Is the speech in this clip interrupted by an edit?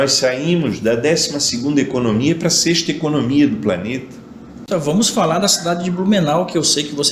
yes; 1 cut; at 4.7 s

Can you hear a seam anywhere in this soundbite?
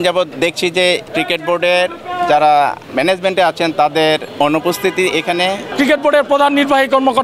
yes; 4 cuts; at 0.8 s, 2.8 s, 4.3 s, 5.6 s

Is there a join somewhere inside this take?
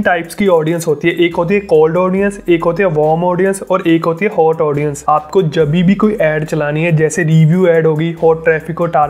yes; 1 cut; at 5.0 s

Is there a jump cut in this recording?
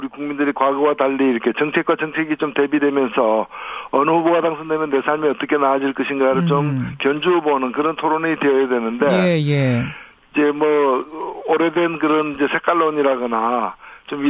yes; 1 cut; at 2.6 s

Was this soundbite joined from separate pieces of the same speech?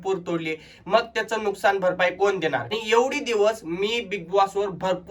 yes; 1 cut; at 2.7 s

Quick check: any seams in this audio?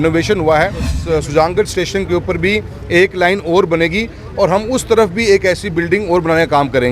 yes; 1 cut; at 0.9 s

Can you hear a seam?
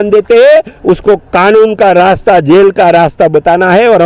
no; 0 cuts

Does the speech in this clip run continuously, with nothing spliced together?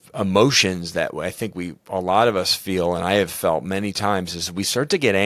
yes; 0 cuts

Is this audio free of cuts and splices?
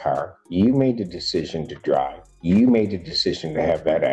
yes; 0 cuts

